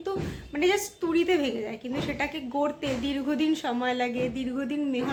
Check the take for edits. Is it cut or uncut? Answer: uncut